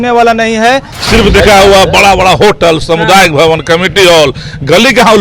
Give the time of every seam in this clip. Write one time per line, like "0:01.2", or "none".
0:00.9